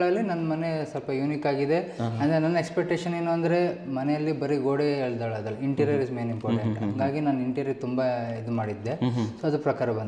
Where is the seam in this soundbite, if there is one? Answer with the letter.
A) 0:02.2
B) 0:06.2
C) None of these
C